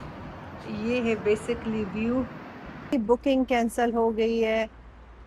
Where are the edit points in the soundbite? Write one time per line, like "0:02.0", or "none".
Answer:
0:02.9